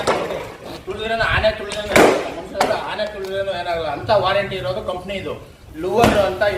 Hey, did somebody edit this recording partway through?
yes; 1 cut; at 5.6 s

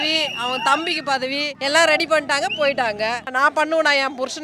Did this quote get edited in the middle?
yes; 2 cuts; at 1.5 s, 3.3 s

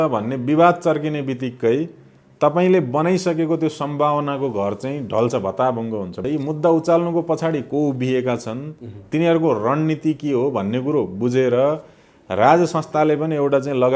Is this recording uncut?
no; 1 cut; at 6.2 s

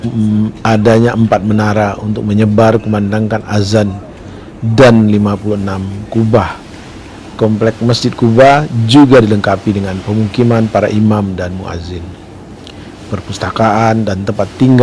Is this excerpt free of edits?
yes; 0 cuts

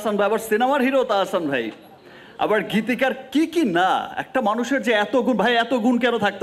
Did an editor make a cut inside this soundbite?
no; 0 cuts

